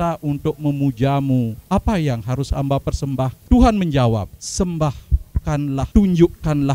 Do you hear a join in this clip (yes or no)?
yes